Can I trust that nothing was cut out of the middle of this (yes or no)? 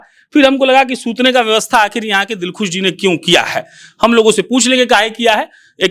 yes